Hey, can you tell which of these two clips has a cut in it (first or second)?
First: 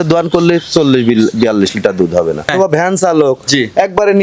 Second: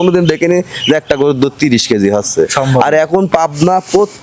first